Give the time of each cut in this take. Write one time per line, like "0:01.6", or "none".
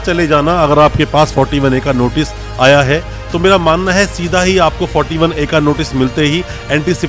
none